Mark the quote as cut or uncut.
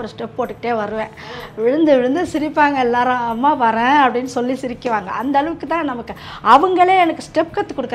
uncut